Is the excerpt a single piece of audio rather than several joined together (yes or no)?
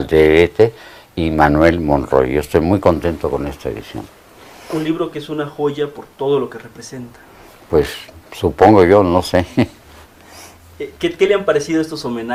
yes